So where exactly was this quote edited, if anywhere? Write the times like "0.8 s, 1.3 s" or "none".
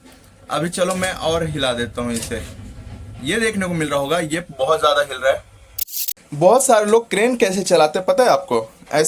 5.9 s